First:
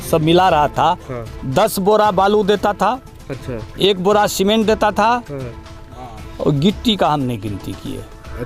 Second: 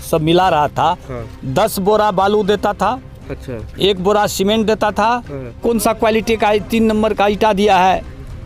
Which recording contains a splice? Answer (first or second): second